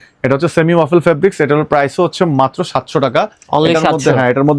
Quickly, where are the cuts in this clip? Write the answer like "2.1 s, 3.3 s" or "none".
none